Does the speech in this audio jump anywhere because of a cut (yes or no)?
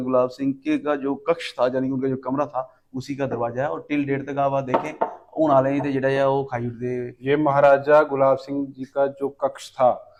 no